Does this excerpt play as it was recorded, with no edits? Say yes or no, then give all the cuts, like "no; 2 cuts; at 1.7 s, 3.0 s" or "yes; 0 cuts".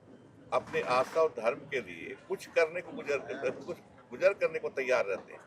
yes; 0 cuts